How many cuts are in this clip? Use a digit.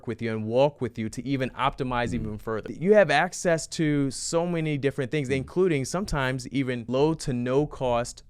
2